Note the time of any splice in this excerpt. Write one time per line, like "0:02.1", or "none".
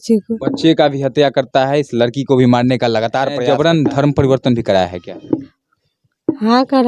0:03.4